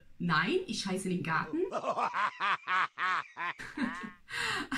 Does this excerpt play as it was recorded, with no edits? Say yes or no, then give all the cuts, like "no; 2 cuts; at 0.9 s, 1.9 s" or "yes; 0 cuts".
no; 2 cuts; at 1.7 s, 3.7 s